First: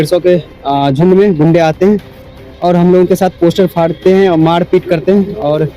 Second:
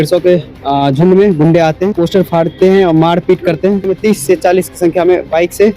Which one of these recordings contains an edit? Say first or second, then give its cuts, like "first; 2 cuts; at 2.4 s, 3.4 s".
second; 2 cuts; at 1.9 s, 3.9 s